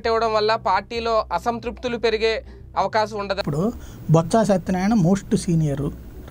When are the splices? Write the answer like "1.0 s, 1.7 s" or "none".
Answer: 3.4 s